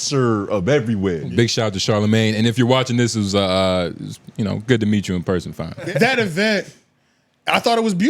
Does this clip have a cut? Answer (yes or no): yes